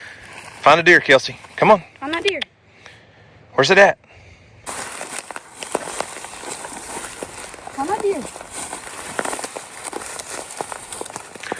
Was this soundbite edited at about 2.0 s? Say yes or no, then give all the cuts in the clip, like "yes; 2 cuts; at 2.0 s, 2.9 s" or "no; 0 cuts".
no; 1 cut; at 4.7 s